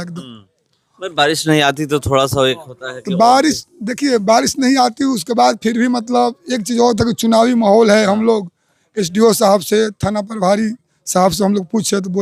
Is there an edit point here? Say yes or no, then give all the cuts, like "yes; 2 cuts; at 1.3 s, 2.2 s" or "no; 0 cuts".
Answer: no; 0 cuts